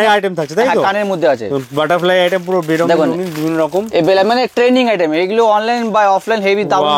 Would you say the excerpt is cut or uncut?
uncut